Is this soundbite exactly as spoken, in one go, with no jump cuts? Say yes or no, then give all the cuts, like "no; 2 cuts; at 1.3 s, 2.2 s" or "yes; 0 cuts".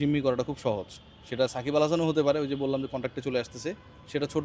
yes; 0 cuts